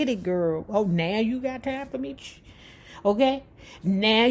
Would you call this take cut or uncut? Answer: cut